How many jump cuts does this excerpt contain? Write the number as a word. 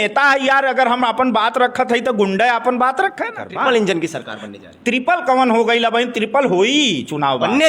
one